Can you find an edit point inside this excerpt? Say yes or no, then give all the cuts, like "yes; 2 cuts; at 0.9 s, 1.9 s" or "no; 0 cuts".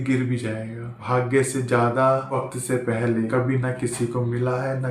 yes; 3 cuts; at 0.9 s, 2.3 s, 3.3 s